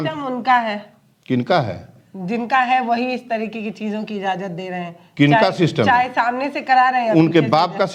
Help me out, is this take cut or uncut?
uncut